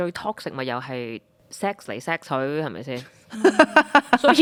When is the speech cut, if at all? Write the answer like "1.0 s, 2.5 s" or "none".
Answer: none

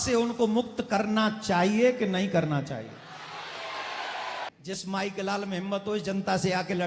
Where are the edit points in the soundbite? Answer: 4.5 s

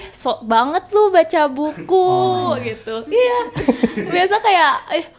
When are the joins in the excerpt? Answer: none

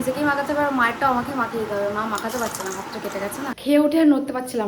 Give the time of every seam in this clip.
3.5 s

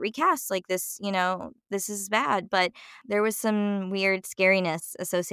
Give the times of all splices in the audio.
1.5 s, 3.0 s

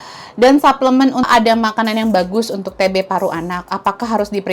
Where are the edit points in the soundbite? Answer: 1.2 s

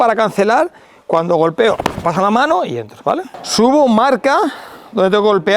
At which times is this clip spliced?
3.4 s

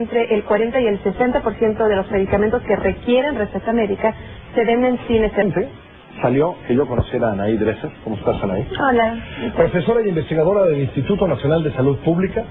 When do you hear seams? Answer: none

